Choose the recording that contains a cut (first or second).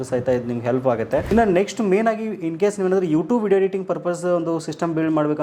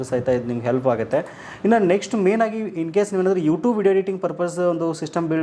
first